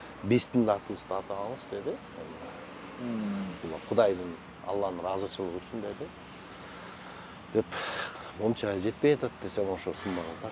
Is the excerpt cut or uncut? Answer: uncut